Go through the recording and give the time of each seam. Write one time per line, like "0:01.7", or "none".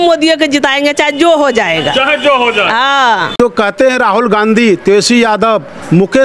0:03.4